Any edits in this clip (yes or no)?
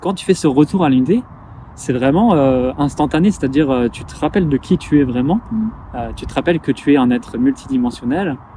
no